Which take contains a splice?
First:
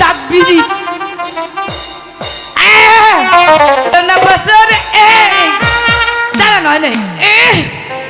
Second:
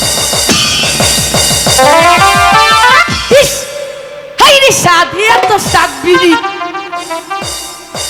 first; 1 cut; at 3.9 s

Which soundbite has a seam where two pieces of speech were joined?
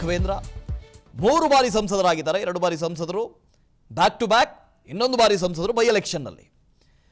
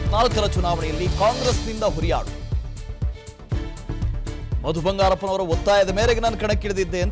second; 1 cut; at 2.9 s

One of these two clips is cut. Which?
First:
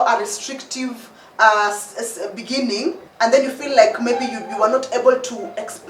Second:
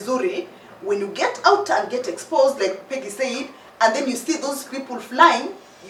first; 1 cut; at 3.0 s

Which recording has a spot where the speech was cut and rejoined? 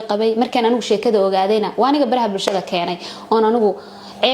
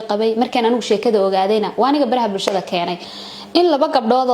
second; 1 cut; at 3.1 s

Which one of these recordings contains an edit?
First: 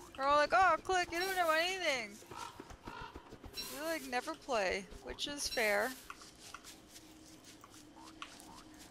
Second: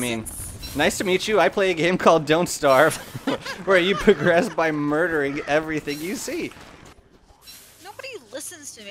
second; 1 cut; at 6.9 s

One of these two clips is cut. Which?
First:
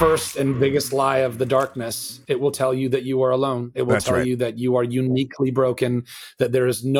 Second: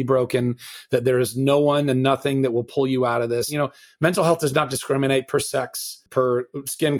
second; 2 cuts; at 3.5 s, 6.0 s

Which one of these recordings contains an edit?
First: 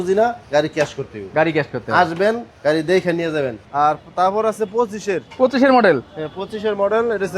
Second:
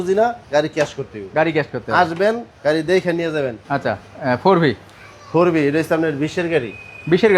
first; 1 cut; at 3.6 s

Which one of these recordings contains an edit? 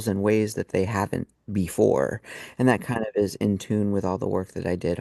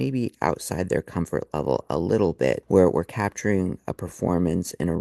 second; 1 cut; at 2.6 s

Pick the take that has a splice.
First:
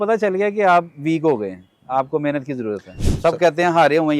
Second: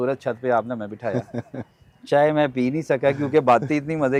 first; 1 cut; at 2.9 s

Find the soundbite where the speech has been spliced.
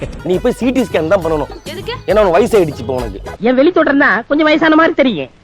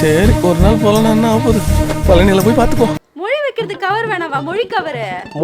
second; 1 cut; at 3.0 s

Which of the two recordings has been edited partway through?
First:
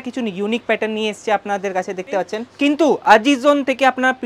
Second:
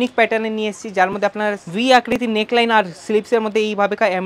first; 1 cut; at 2.5 s

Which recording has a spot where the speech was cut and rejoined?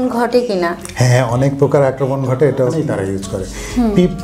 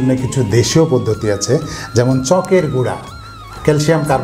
first; 1 cut; at 2.8 s

